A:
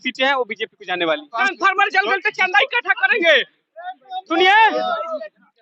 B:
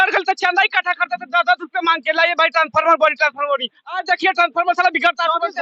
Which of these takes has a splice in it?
A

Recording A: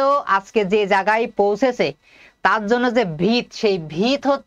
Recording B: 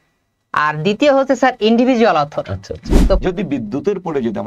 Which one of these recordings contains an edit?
B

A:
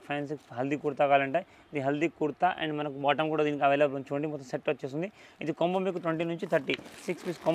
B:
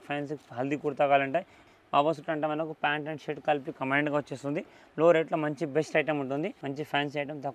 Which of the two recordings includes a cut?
B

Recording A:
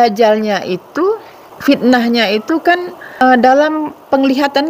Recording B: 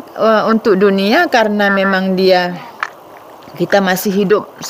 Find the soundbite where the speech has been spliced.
A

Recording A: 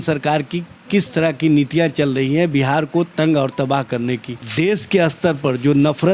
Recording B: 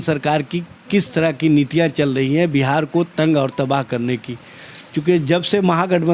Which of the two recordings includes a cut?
A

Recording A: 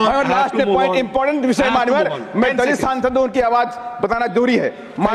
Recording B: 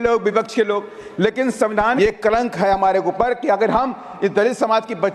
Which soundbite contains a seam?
B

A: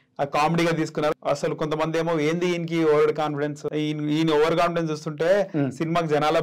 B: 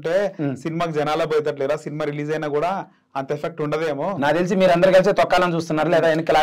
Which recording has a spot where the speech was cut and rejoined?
A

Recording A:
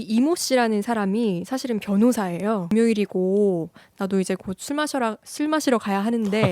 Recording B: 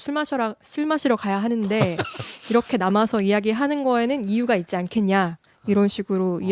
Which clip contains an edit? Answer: A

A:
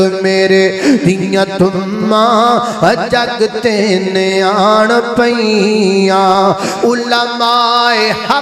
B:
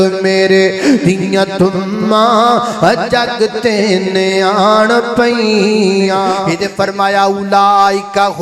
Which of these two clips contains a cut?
B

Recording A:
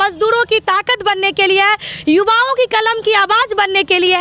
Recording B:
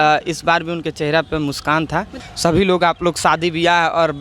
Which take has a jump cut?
B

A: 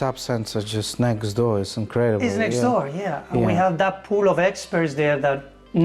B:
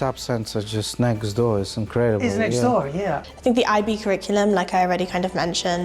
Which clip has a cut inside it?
B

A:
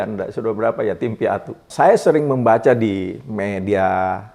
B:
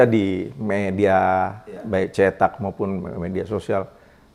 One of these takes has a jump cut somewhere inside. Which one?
A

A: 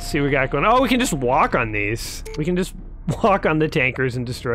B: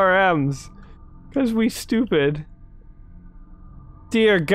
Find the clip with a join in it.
B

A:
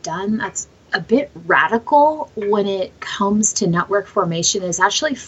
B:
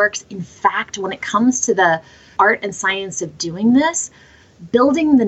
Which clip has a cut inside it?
B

